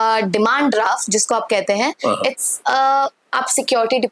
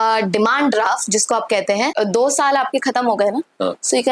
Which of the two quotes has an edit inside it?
second; 1 cut; at 1.9 s

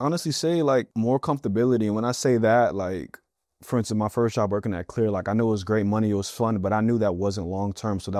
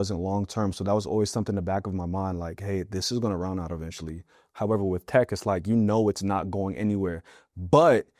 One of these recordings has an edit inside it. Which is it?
first; 1 cut; at 0.9 s

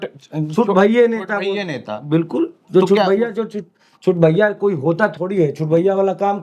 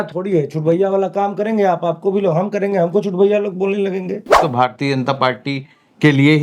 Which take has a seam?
second; 1 cut; at 4.4 s

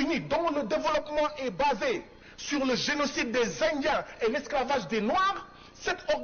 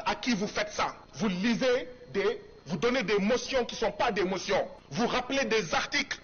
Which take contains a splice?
second; 2 cuts; at 1.0 s, 4.8 s

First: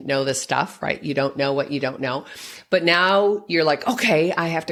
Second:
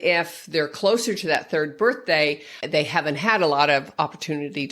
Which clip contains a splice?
second; 1 cut; at 2.5 s

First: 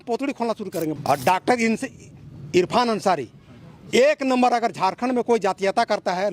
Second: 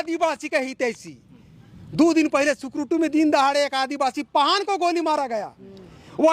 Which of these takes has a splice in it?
first; 1 cut; at 1.0 s

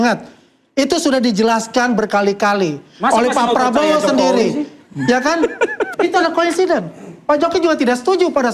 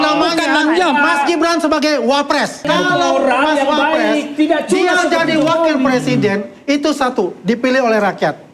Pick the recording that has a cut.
second; 1 cut; at 2.7 s

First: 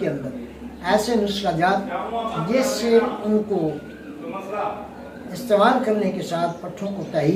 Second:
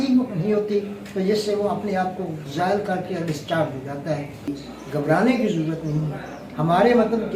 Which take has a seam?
second; 1 cut; at 4.5 s

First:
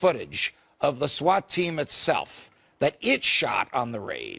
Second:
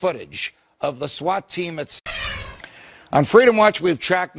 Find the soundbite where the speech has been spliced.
first; 1 cut; at 2.0 s

